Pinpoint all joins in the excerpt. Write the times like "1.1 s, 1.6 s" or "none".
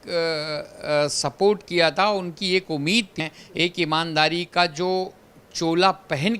3.1 s